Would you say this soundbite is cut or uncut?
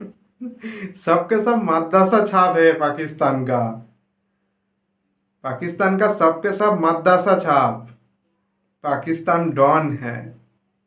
uncut